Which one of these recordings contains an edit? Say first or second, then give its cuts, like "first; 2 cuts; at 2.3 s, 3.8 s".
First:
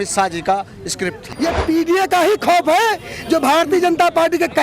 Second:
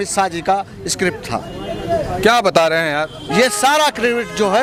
first; 1 cut; at 1.2 s